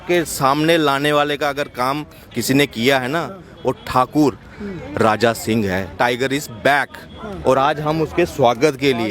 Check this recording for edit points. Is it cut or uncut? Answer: cut